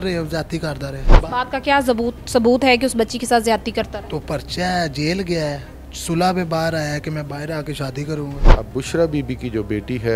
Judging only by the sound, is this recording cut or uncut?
cut